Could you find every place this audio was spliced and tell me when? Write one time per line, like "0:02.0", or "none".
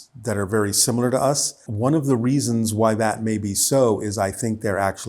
0:01.6